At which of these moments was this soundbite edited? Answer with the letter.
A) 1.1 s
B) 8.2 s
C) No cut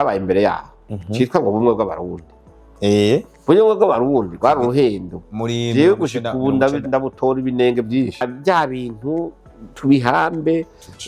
B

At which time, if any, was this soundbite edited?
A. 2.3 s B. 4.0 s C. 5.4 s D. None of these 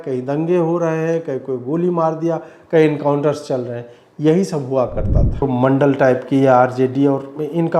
C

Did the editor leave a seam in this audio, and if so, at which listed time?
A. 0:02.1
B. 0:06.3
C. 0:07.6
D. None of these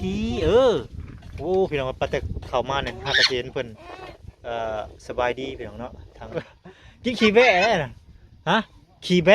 B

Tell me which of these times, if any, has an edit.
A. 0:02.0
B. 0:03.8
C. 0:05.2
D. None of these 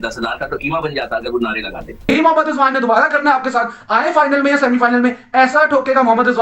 A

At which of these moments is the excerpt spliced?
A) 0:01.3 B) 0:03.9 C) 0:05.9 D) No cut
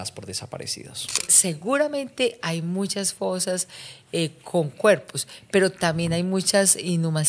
A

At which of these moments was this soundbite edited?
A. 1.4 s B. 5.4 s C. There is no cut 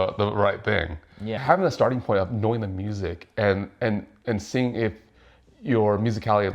A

